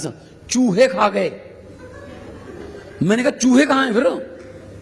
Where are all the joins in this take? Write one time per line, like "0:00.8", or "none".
0:01.5